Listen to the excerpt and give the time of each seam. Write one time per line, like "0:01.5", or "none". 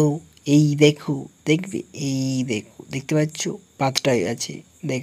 none